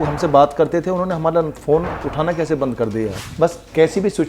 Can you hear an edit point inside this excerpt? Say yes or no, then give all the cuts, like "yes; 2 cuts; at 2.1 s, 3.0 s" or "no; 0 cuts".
yes; 1 cut; at 3.2 s